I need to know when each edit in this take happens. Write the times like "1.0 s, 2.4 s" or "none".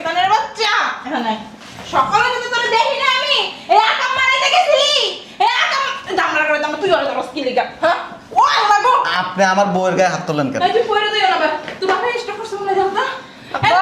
none